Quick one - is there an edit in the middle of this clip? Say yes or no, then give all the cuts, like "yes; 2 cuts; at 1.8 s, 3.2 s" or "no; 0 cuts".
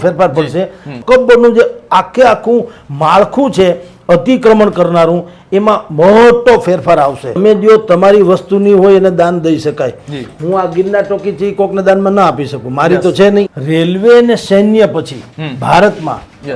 yes; 3 cuts; at 0.9 s, 7.4 s, 13.6 s